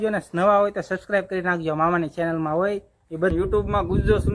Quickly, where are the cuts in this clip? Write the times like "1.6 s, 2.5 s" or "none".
3.3 s